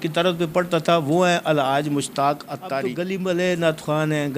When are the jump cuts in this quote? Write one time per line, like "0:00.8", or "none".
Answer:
0:02.8